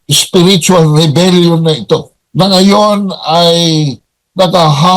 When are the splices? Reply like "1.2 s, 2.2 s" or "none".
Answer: 2.2 s